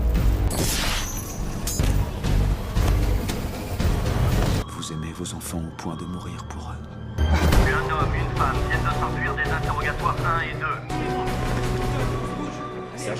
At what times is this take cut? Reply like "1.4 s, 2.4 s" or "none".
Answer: 4.6 s